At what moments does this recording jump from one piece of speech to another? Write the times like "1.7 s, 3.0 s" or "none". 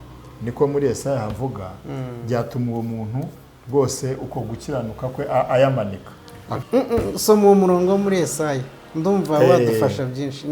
6.4 s